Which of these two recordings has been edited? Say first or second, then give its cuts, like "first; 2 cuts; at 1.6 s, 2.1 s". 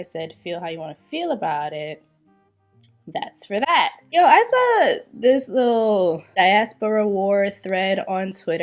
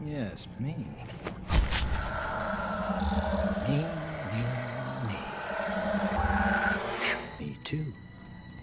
first; 2 cuts; at 4.0 s, 6.2 s